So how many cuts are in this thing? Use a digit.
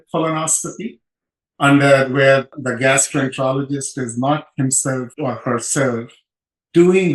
1